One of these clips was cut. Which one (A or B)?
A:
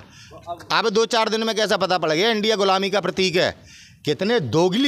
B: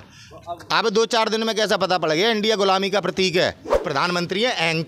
B